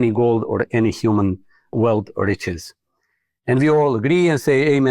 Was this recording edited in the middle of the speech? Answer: yes; 1 cut; at 1.7 s

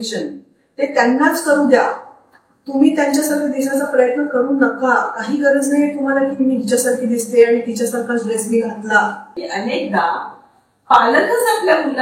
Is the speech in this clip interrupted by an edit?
yes; 1 cut; at 9.4 s

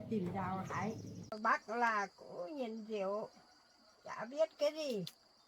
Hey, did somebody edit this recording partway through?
yes; 1 cut; at 1.4 s

